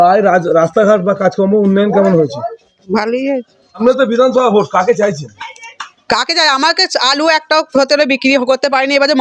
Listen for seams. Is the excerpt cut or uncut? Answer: cut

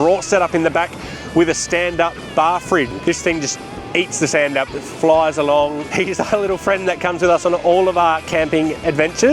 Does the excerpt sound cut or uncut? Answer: cut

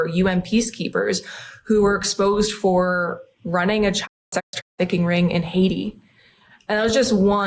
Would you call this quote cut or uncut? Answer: uncut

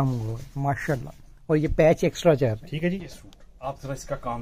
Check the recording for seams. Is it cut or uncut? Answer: cut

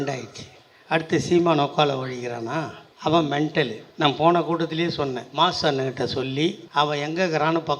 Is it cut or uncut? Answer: cut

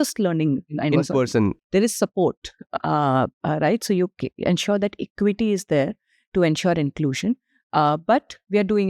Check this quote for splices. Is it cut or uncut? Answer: cut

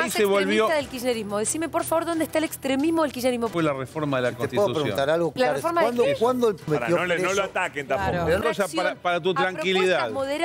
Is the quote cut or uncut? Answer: cut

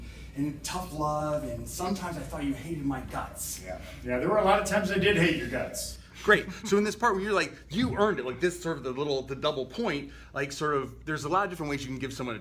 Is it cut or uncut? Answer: uncut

